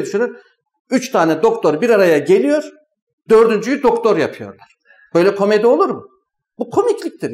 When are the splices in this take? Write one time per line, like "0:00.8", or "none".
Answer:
none